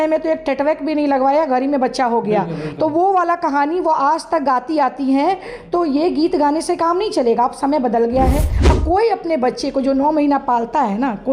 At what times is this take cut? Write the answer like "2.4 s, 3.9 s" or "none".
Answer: 8.6 s